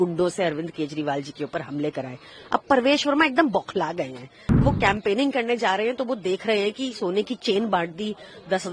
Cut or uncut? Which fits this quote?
cut